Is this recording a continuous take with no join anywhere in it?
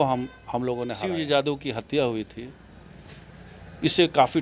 no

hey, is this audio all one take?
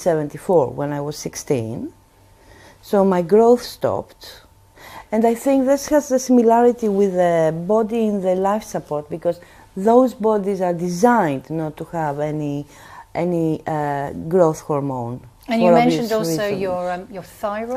yes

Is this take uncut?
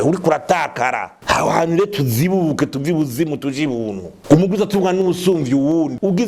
no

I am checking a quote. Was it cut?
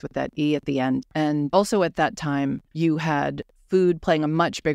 yes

